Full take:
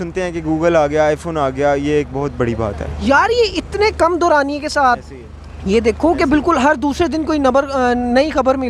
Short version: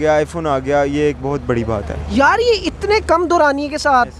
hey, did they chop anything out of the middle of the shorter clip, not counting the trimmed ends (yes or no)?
no